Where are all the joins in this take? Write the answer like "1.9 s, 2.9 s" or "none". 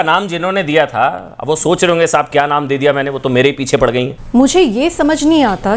4.2 s